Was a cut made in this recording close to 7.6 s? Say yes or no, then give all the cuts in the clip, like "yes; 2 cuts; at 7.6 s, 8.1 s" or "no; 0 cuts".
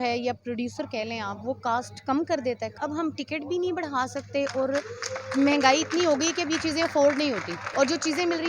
yes; 2 cuts; at 2.8 s, 7.6 s